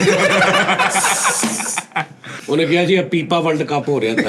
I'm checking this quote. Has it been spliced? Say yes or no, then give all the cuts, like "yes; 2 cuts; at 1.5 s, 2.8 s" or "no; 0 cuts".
yes; 1 cut; at 2.3 s